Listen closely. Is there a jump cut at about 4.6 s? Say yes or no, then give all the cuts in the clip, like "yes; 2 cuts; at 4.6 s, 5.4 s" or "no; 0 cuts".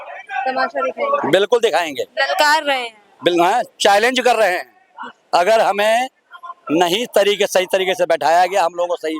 no; 0 cuts